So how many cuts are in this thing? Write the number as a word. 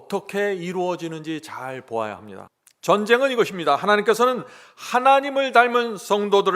one